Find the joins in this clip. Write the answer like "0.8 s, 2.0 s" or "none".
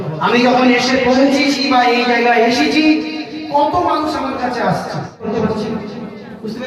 5.3 s